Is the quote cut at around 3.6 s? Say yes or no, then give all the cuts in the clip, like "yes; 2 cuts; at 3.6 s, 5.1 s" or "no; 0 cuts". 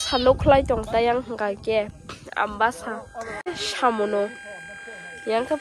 yes; 1 cut; at 3.6 s